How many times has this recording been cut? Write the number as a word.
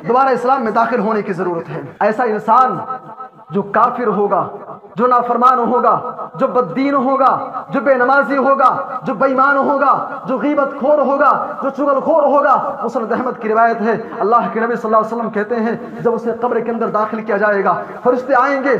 one